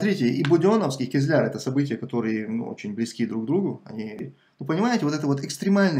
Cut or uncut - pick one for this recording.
cut